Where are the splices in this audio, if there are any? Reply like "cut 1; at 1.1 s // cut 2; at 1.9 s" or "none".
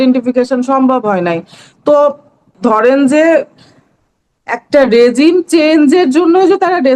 cut 1; at 2.5 s